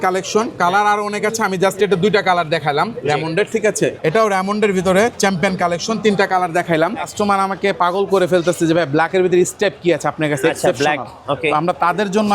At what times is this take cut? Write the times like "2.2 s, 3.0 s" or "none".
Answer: 4.0 s, 7.1 s